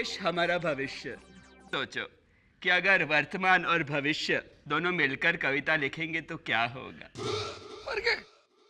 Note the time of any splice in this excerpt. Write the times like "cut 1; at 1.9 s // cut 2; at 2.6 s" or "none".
cut 1; at 1.7 s